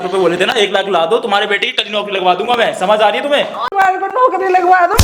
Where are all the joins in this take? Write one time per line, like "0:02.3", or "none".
0:03.6

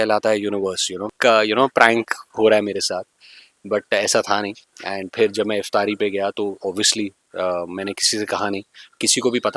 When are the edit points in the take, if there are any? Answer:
0:01.1

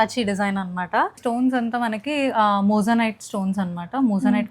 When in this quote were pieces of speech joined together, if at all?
0:01.1

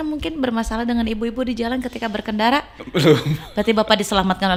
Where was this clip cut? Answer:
none

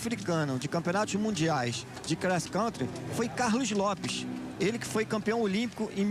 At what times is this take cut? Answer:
0:02.2

